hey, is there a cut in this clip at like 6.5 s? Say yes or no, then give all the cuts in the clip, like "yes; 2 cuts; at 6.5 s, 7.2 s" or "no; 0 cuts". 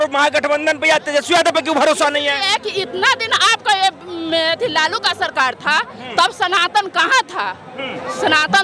no; 0 cuts